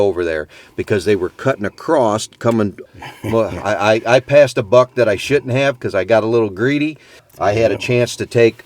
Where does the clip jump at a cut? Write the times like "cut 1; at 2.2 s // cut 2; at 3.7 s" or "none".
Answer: cut 1; at 2.8 s // cut 2; at 7.2 s